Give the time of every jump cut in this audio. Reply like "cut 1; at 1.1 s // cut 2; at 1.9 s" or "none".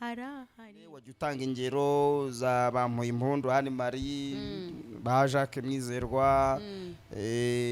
cut 1; at 1.2 s